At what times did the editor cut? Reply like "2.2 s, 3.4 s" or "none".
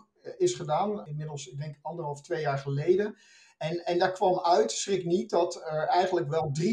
1.1 s